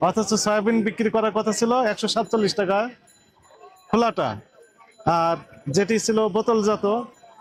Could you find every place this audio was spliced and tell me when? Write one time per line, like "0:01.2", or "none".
none